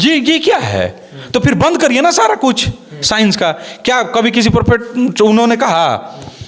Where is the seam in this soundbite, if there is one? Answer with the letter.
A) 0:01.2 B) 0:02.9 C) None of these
C